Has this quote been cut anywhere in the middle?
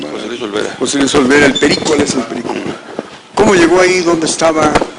no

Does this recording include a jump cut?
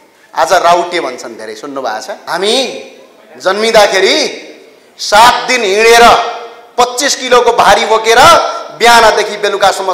yes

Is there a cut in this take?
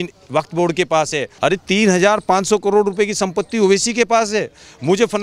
yes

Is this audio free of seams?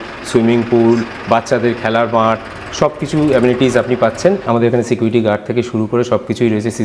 no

